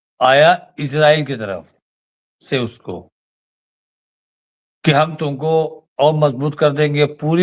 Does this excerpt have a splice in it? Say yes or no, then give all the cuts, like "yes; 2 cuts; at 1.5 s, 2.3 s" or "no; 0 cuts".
no; 0 cuts